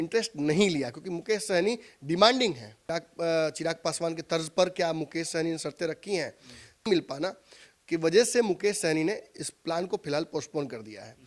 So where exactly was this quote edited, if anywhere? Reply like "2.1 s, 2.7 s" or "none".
2.8 s, 6.9 s